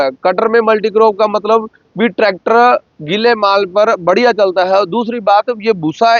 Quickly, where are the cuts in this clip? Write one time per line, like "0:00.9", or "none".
none